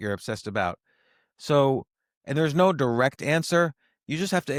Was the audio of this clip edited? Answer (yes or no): no